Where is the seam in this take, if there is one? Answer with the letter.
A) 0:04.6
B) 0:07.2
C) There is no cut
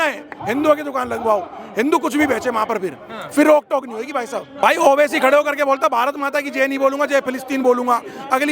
A